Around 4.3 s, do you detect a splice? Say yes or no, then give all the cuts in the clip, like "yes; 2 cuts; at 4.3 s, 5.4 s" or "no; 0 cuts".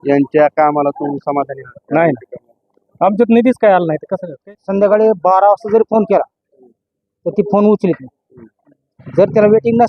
yes; 1 cut; at 4.3 s